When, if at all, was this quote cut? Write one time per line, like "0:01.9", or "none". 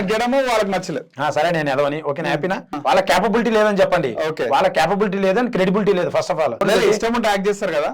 0:02.7
0:06.6